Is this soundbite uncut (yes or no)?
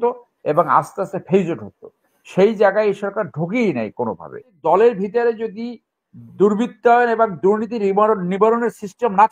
no